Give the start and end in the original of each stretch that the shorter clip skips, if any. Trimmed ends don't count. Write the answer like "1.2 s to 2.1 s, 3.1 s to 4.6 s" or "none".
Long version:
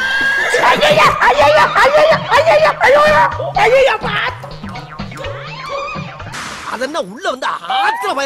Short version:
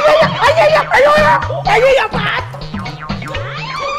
none

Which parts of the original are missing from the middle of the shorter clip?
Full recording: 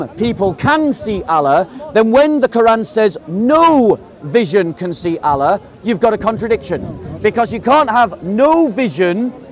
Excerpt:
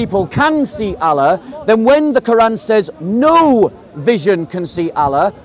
none

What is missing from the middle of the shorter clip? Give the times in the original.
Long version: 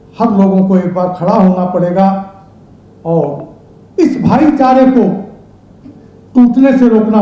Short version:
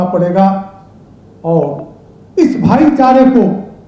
none

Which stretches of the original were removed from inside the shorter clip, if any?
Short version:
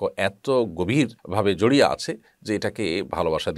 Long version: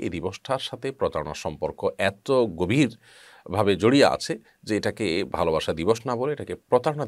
3.0 s to 3.4 s

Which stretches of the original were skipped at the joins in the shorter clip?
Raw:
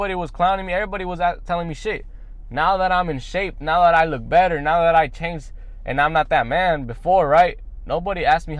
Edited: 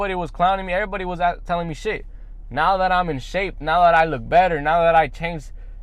none

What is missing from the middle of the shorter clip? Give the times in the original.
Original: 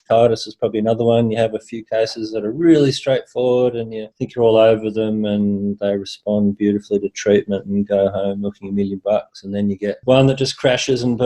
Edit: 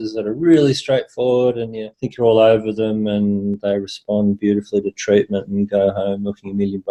none

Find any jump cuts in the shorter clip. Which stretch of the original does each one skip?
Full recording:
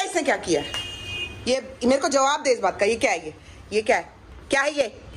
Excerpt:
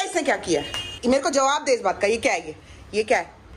0.9 s to 1.7 s

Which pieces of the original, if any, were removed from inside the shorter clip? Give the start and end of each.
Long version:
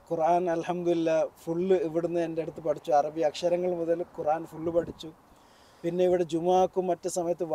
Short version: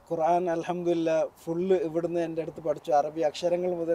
none

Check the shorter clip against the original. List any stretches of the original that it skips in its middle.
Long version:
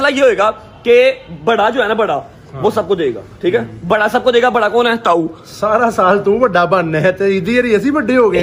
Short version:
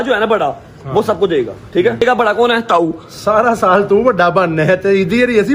3.7 s to 4.4 s

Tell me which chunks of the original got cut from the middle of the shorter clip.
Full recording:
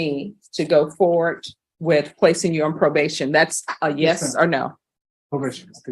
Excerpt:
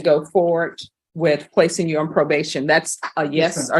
none

